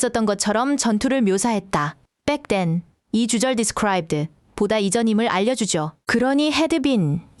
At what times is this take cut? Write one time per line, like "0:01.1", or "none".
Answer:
0:06.0